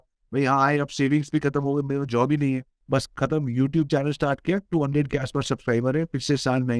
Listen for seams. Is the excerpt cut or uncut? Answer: cut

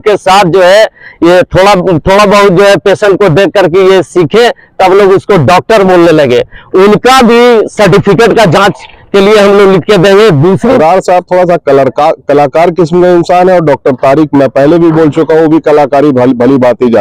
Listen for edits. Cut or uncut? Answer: cut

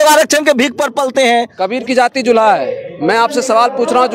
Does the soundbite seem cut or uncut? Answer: cut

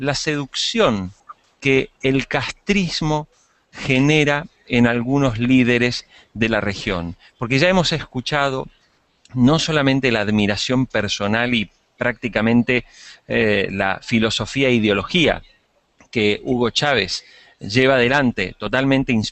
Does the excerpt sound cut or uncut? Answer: cut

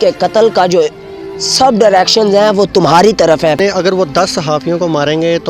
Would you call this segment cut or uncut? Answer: cut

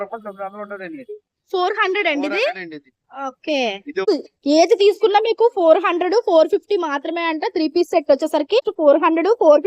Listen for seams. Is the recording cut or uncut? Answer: cut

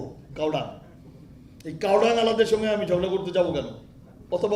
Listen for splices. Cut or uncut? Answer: uncut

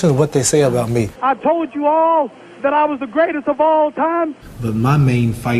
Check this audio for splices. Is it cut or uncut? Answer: cut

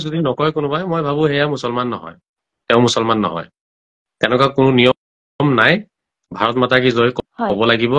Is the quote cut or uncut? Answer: uncut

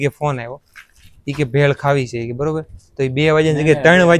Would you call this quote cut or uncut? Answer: uncut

